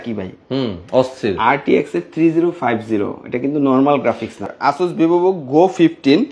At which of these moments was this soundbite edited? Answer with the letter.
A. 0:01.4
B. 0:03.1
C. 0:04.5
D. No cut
C